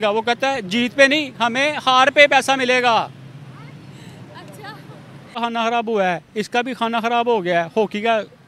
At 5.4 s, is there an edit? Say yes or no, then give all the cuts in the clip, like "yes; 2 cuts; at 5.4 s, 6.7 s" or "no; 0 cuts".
yes; 1 cut; at 5.4 s